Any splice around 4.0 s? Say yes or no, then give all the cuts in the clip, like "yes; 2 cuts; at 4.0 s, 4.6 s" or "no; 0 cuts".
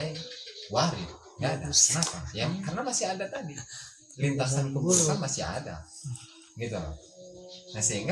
no; 0 cuts